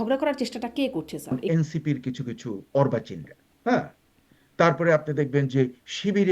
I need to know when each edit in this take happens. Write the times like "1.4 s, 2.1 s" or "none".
1.4 s